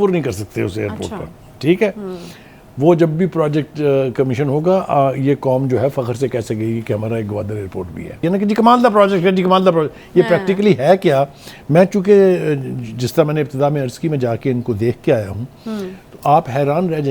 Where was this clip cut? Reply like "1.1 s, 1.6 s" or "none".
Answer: 8.2 s

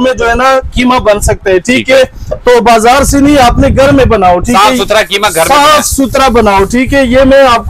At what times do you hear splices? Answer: none

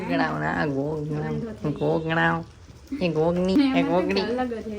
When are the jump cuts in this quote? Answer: 3.5 s

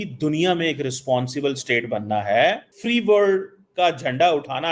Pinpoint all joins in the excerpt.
2.7 s

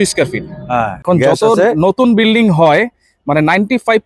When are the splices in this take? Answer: 1.0 s

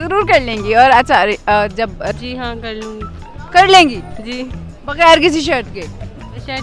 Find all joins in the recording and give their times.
2.1 s

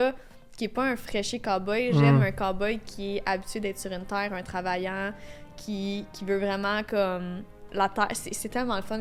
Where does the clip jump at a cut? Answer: none

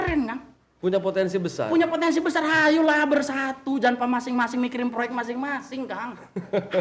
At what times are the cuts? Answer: none

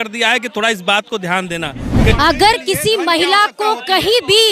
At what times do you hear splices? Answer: 2.1 s

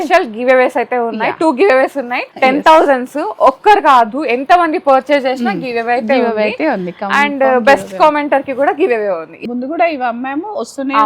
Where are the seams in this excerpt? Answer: 2.3 s, 9.3 s

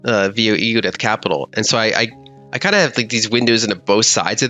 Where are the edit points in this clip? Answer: none

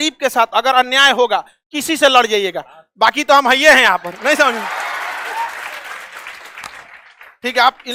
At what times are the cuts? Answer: none

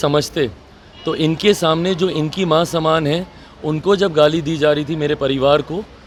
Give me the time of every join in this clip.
none

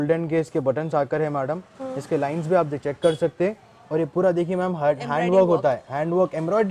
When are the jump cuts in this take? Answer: none

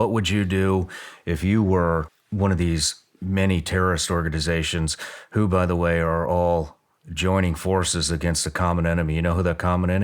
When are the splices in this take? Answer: 2.2 s

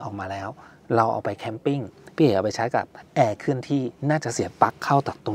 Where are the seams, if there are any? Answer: none

